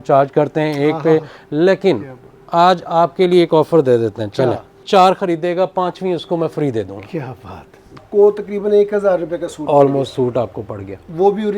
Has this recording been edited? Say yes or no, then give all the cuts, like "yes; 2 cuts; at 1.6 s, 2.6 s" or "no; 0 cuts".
yes; 2 cuts; at 4.8 s, 8.0 s